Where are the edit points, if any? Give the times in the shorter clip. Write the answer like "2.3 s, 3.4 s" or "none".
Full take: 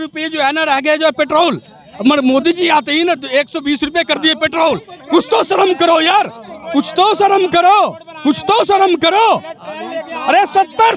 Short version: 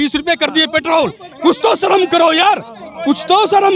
none